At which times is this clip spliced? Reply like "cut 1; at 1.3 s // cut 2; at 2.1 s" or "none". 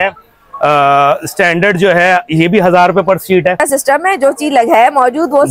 cut 1; at 3.6 s